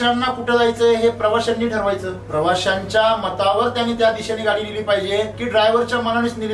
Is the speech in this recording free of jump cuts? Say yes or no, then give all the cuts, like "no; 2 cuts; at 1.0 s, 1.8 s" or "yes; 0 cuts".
no; 2 cuts; at 2.2 s, 5.4 s